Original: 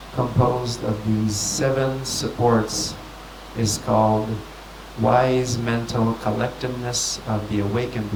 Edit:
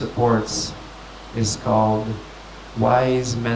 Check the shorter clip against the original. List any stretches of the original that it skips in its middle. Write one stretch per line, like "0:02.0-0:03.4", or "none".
none